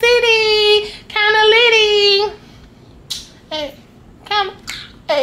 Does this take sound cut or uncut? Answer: uncut